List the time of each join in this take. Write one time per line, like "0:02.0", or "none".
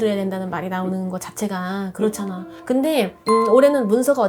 none